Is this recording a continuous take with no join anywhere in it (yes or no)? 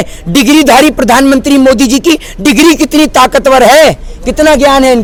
yes